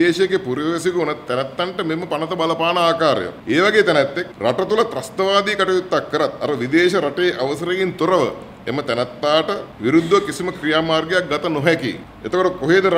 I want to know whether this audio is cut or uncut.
uncut